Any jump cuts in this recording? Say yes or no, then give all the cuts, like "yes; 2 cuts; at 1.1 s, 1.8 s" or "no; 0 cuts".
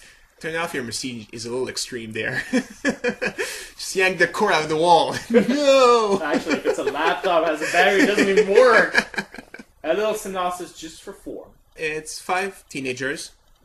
yes; 1 cut; at 2.1 s